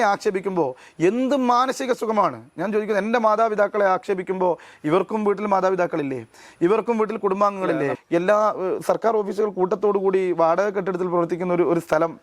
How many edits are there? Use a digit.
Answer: 1